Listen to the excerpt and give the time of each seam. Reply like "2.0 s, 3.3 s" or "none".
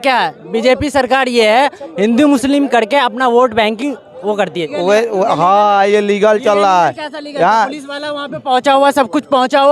4.7 s